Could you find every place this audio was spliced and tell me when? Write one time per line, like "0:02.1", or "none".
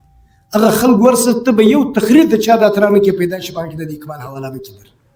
none